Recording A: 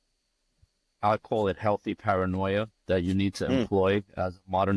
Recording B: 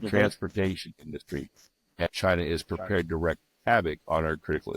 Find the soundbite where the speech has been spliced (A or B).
B